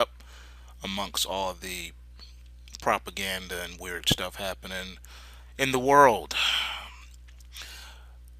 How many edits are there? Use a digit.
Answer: 1